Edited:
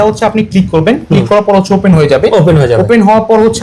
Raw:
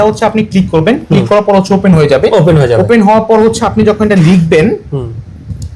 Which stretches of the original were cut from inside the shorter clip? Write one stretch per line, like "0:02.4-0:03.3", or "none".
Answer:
none